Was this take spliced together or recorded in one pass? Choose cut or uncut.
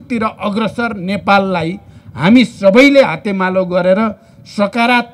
uncut